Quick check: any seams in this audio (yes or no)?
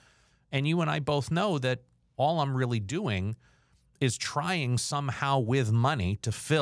no